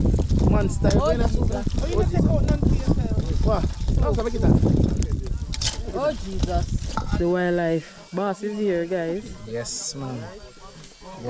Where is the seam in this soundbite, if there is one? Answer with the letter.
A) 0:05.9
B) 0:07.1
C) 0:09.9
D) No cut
B